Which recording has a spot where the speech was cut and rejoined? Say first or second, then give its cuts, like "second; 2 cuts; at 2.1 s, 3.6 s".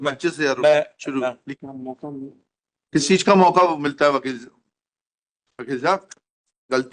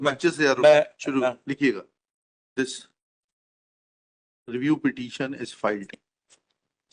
first; 1 cut; at 1.5 s